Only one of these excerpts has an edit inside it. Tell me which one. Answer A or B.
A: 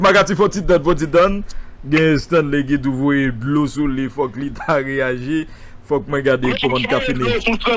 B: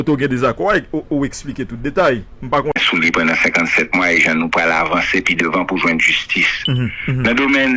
B